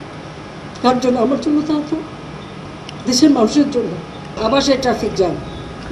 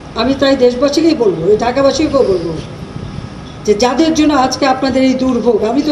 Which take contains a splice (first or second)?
first